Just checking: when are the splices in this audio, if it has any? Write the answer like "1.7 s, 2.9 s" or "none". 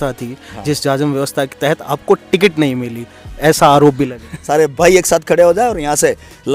4.3 s